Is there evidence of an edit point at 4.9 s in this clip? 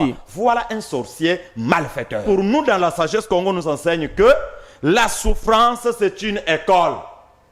no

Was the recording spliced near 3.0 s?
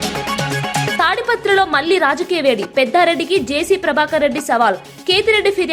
no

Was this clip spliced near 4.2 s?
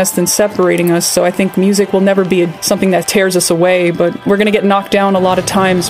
yes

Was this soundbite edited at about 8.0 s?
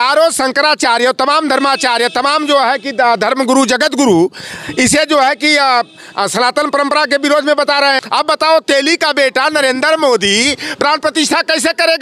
yes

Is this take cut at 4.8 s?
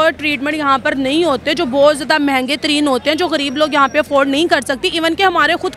no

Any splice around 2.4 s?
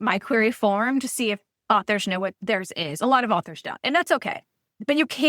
yes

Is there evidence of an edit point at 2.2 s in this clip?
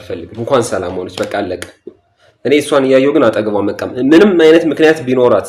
no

